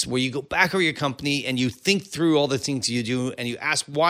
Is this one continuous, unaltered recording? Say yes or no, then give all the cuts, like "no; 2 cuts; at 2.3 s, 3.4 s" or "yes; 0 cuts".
yes; 0 cuts